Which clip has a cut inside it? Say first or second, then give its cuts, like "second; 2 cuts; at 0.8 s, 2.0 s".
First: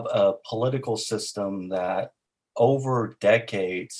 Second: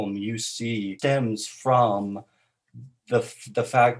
second; 1 cut; at 0.9 s